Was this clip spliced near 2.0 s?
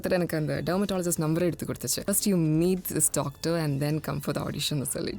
yes; 1 cut; at 2.0 s

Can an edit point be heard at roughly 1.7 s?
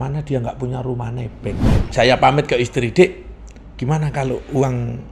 yes; 1 cut; at 1.7 s

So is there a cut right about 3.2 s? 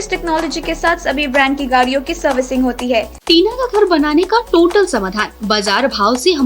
yes; 1 cut; at 3.2 s

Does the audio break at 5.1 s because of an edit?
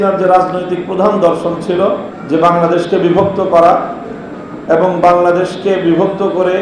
no; 1 cut; at 2.1 s

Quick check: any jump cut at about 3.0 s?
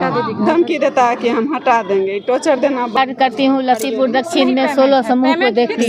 yes; 1 cut; at 3.0 s

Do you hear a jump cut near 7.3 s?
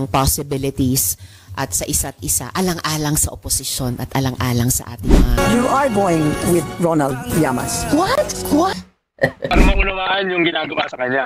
no; 2 cuts; at 5.2 s, 9.5 s

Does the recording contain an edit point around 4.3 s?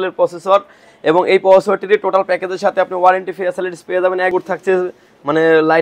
yes; 1 cut; at 4.3 s

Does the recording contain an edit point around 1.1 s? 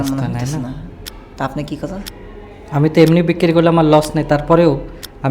yes; 1 cut; at 1.1 s

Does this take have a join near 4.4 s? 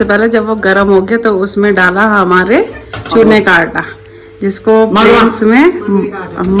no; 0 cuts

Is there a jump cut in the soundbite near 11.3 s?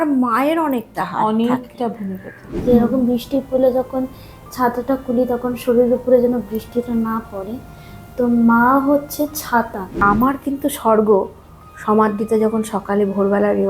no; 2 cuts; at 2.6 s, 10.0 s

